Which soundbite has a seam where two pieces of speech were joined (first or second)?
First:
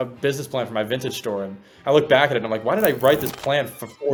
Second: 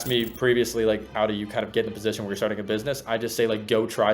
second